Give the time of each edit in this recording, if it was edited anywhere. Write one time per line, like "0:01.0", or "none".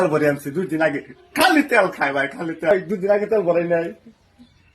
0:02.7